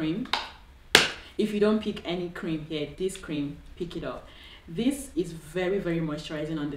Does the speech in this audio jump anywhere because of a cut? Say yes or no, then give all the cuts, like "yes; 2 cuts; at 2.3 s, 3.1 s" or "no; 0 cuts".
no; 0 cuts